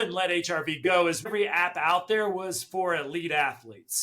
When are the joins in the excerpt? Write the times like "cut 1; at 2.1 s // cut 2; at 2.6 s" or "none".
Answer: cut 1; at 1.3 s